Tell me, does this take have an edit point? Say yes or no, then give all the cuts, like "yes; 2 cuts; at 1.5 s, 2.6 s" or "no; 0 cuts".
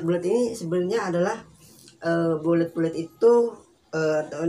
no; 0 cuts